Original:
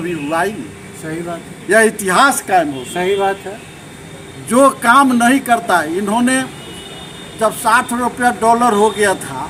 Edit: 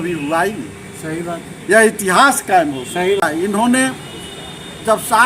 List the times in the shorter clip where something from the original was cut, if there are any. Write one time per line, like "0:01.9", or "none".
0:03.2